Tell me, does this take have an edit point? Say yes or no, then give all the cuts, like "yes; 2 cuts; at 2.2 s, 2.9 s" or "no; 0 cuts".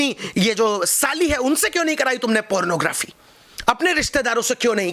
no; 0 cuts